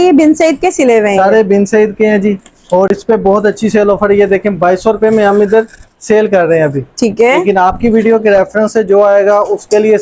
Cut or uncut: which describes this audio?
uncut